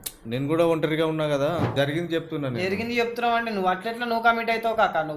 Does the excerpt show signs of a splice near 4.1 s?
no; 1 cut; at 1.7 s

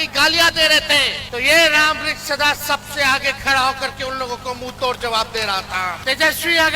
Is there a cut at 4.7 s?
no; 2 cuts; at 1.2 s, 6.0 s

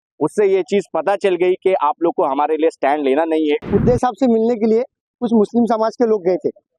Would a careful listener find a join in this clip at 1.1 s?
no; 1 cut; at 3.6 s

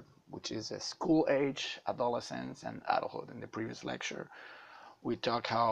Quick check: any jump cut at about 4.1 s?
no; 1 cut; at 2.2 s

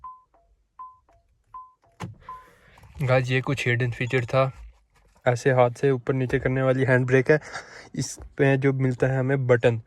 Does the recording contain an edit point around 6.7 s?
no; 1 cut; at 5.1 s

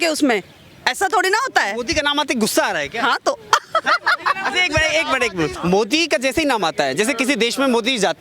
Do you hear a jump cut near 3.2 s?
no; 1 cut; at 5.6 s

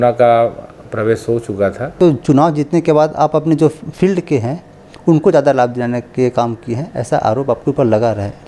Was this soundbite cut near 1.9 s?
yes; 1 cut; at 1.9 s

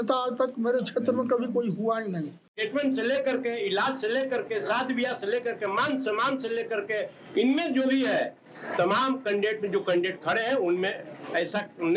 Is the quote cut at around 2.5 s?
yes; 1 cut; at 2.5 s

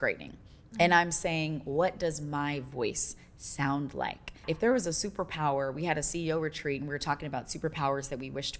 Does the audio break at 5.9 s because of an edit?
no; 1 cut; at 4.3 s

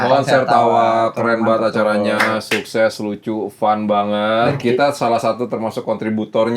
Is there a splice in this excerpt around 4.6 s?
yes; 1 cut; at 4.6 s

